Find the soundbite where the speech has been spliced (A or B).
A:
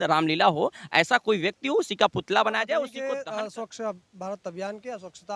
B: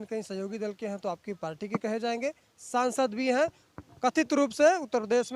A